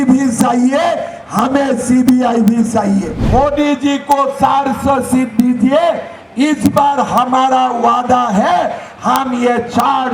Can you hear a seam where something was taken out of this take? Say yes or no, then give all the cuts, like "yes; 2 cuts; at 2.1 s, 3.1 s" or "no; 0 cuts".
yes; 1 cut; at 3.2 s